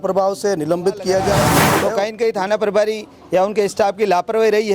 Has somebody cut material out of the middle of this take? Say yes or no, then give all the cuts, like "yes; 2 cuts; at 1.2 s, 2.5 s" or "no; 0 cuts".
yes; 1 cut; at 1.6 s